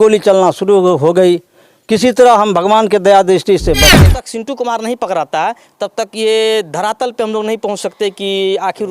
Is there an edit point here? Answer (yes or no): yes